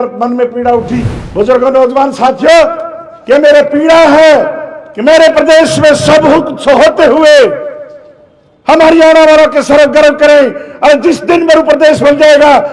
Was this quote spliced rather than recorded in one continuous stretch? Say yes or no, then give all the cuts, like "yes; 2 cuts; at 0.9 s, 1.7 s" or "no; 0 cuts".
yes; 1 cut; at 1.2 s